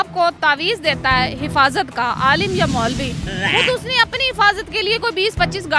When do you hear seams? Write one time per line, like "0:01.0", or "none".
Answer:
none

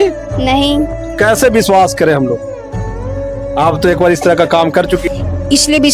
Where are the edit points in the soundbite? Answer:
0:05.0

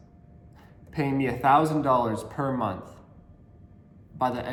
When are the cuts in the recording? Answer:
none

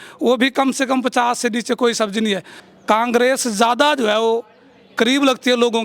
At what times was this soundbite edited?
0:02.5

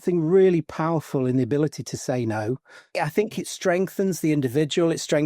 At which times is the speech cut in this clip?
0:02.8

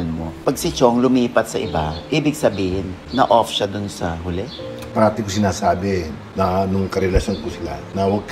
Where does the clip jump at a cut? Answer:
0:04.8

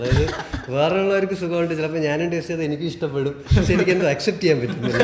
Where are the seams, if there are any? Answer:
none

